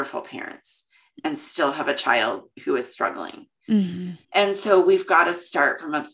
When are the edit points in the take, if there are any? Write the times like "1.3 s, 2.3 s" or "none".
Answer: none